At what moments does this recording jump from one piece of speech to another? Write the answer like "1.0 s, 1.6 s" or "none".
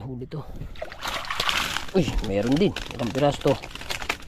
none